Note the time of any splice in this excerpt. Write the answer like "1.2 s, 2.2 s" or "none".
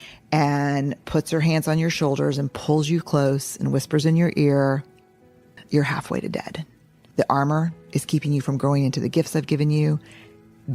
5.6 s, 7.0 s